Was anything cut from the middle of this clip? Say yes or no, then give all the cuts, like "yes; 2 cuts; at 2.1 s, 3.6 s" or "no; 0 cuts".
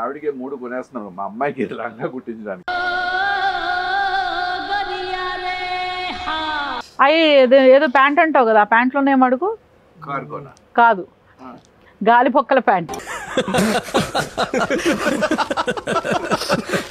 yes; 1 cut; at 6.9 s